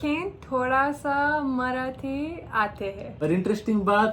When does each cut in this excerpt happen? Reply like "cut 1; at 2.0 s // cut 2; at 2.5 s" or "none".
cut 1; at 3.0 s